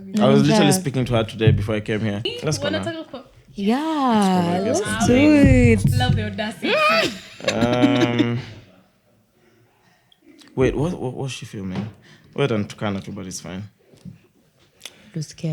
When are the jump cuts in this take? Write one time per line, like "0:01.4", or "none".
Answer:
0:02.3

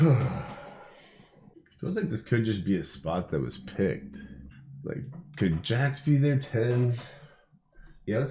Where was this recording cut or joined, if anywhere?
none

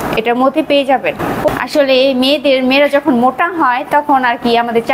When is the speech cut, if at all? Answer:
0:01.5

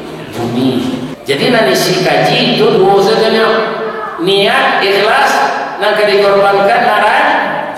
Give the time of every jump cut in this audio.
0:01.1

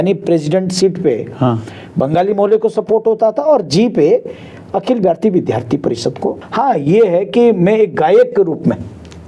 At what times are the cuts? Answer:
0:06.4

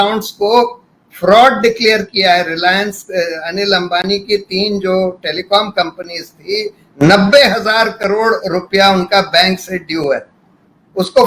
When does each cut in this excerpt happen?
none

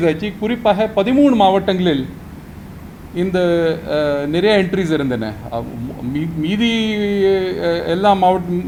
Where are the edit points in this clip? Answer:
none

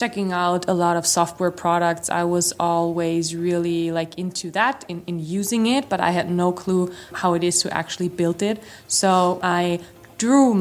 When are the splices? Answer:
0:07.1
0:09.4

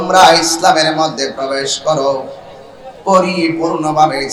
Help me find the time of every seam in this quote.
none

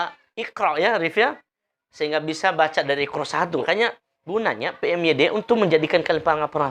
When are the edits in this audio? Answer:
0:03.6

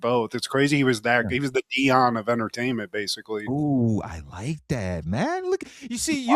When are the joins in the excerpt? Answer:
none

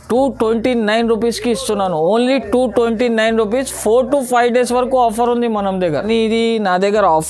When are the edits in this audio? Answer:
0:06.0

